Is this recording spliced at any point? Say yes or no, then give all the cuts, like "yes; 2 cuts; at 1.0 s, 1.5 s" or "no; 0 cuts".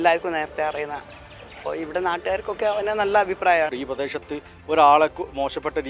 yes; 1 cut; at 3.7 s